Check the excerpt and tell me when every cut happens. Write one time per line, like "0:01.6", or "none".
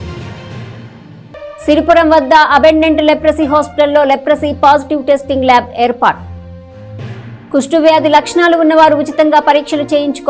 0:01.2